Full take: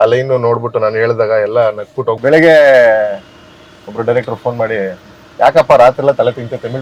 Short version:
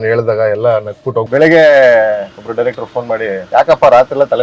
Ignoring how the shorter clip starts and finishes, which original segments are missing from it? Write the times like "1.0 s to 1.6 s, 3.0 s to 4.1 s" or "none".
3.3 s to 3.9 s, 4.9 s to 5.3 s